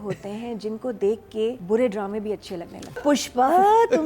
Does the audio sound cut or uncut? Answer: cut